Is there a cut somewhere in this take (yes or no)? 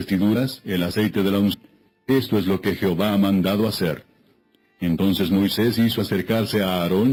no